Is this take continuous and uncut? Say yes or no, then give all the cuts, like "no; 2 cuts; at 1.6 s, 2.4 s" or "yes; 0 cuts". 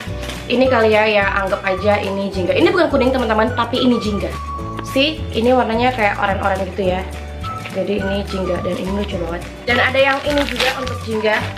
no; 1 cut; at 1.0 s